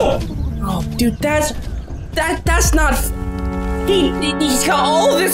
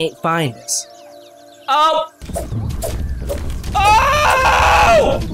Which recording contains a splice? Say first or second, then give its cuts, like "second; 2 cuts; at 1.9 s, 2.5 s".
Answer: second; 1 cut; at 2.2 s